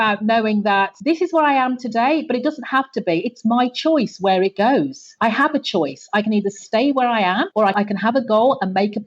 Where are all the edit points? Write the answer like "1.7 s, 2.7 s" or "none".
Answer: 5.0 s, 7.7 s